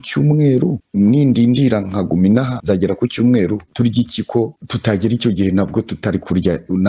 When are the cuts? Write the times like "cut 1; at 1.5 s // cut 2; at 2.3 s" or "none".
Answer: cut 1; at 0.8 s // cut 2; at 2.5 s // cut 3; at 3.7 s // cut 4; at 4.6 s